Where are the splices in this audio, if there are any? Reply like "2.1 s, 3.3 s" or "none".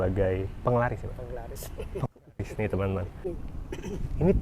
3.3 s